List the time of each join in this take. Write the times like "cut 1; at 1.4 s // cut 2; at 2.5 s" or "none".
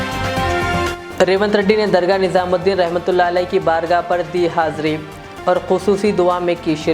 none